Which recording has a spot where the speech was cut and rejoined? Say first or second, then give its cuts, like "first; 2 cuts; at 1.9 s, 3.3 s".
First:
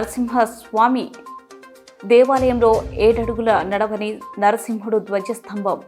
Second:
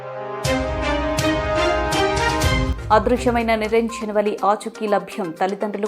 second; 1 cut; at 2.7 s